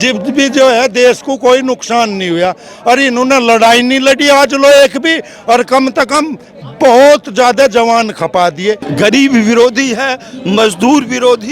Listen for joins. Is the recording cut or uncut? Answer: cut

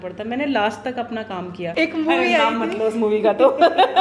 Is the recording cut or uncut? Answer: cut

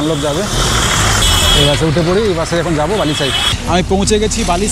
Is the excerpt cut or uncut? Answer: cut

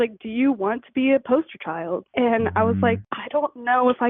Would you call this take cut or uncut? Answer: cut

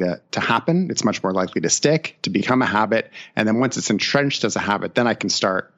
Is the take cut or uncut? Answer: uncut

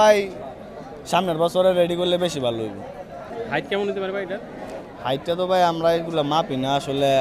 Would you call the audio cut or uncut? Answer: cut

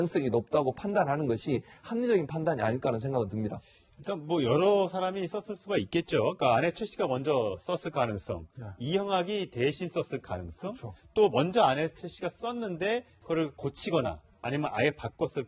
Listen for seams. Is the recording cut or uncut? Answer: cut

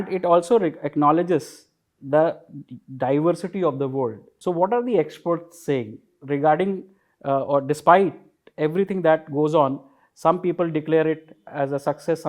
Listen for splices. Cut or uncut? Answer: cut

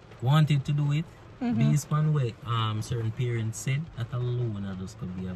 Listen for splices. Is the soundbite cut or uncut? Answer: uncut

